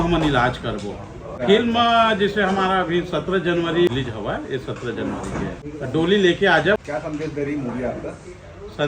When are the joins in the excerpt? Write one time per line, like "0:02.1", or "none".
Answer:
0:01.4
0:03.9
0:05.7
0:06.8